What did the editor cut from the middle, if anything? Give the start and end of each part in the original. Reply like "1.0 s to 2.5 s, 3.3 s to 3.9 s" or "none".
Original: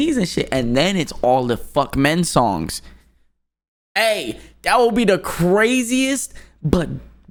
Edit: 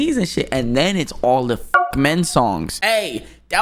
2.7 s to 3.9 s

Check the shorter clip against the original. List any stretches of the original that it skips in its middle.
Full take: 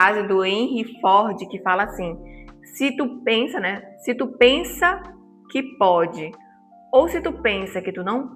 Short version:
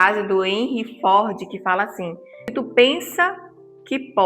2.5 s to 4.2 s

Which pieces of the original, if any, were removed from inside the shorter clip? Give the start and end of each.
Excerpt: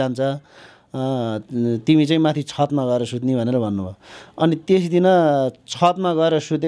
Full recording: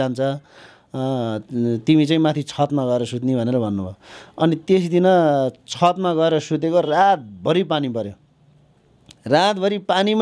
none

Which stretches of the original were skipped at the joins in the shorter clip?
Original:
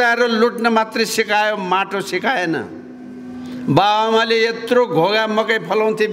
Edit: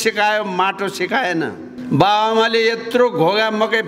2.8 s to 3.5 s

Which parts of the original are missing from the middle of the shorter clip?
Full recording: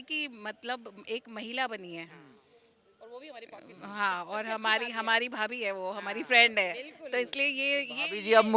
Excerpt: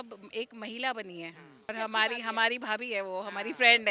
2.4 s to 4.4 s

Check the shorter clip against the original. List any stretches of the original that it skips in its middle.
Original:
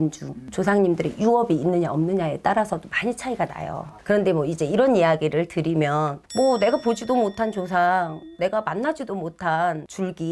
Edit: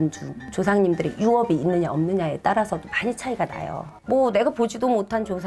3.9 s to 6.2 s

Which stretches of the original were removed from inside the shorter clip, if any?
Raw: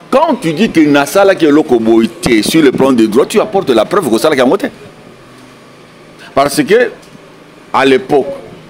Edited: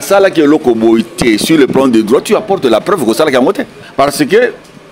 4.8 s to 6.2 s

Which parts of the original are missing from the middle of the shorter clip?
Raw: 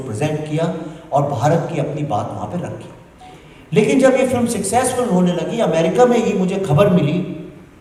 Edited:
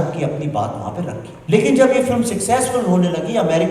2.8 s to 3.5 s

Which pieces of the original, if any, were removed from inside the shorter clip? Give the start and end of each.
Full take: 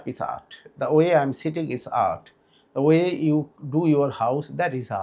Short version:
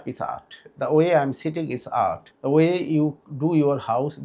2.3 s to 2.6 s

